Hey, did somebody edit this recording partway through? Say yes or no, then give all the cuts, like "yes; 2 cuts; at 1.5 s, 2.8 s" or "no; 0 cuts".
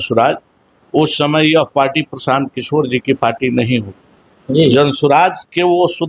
no; 0 cuts